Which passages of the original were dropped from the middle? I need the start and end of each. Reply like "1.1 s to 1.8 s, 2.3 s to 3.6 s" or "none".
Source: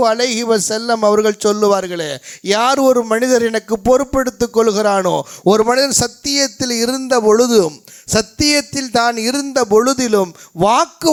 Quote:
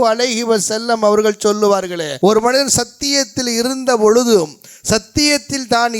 2.1 s to 5.3 s